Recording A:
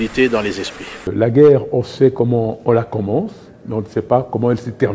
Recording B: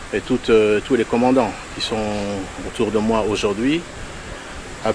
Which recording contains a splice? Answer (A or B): A